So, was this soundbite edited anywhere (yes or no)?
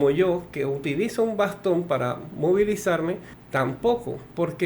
yes